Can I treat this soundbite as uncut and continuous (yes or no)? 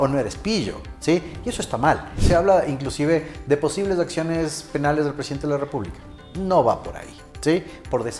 no